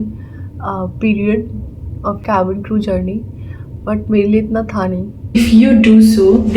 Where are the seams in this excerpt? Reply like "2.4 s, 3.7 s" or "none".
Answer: 2.2 s, 5.4 s